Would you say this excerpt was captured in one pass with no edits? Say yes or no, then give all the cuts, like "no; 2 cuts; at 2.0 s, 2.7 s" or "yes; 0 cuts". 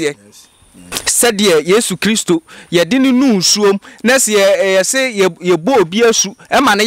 no; 1 cut; at 1.0 s